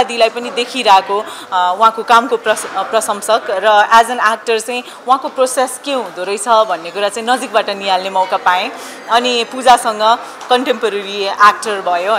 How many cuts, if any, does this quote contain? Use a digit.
0